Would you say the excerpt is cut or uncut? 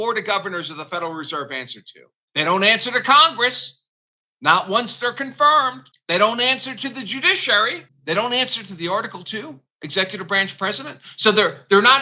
uncut